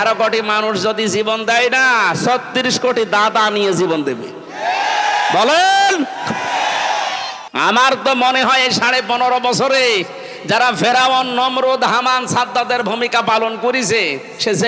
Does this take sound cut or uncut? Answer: cut